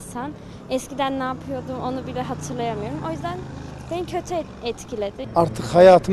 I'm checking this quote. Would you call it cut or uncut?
cut